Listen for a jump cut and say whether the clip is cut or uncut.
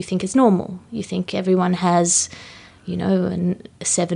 uncut